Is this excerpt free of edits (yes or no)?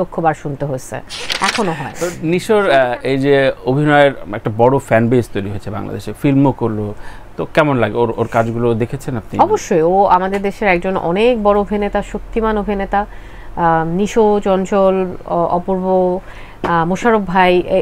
no